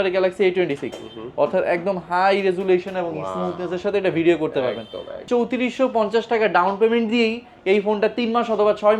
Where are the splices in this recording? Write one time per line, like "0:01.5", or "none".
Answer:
0:05.2